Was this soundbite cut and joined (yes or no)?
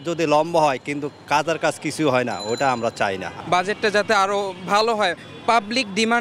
no